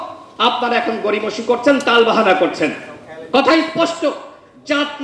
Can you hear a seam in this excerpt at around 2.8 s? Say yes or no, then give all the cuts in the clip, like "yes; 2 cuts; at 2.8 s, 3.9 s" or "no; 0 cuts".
no; 0 cuts